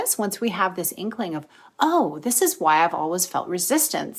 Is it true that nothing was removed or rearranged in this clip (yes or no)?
yes